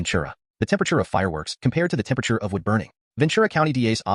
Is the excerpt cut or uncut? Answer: uncut